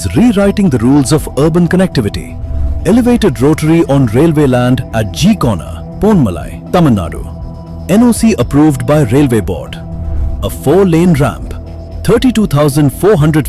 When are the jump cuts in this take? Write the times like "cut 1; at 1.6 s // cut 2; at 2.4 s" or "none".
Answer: none